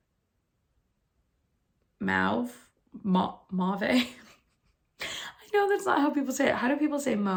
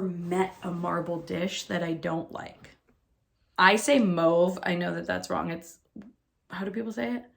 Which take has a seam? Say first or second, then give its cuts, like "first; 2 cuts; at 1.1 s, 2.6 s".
second; 1 cut; at 3.4 s